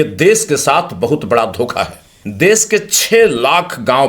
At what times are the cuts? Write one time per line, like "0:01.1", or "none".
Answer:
0:02.2